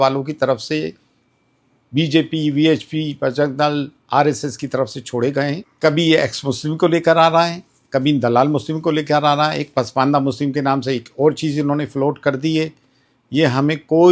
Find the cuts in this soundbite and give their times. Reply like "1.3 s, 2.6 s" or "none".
5.7 s